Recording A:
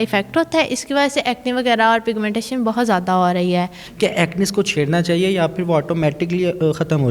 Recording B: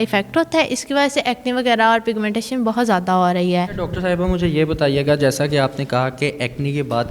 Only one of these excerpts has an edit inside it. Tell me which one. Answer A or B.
A